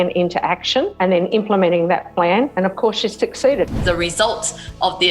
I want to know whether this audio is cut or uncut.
cut